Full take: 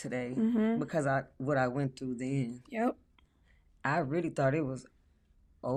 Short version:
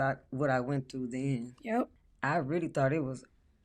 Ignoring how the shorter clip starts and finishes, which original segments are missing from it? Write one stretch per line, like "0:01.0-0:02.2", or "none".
0:03.1-0:03.7